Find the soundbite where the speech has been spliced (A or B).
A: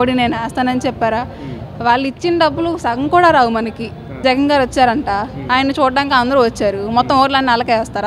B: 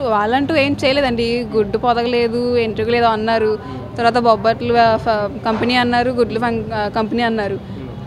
A